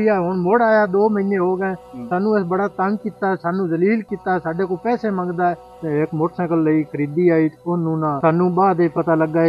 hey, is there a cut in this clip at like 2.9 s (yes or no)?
no